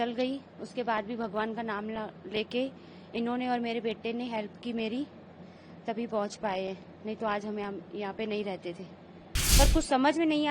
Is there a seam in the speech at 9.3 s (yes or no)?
yes